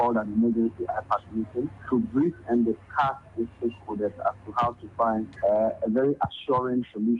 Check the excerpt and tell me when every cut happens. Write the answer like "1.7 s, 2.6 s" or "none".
1.8 s, 5.3 s